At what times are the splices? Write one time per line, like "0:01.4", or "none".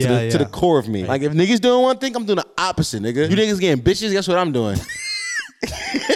0:01.1
0:03.3